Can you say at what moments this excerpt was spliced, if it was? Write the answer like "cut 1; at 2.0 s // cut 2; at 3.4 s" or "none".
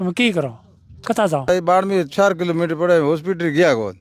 cut 1; at 1.5 s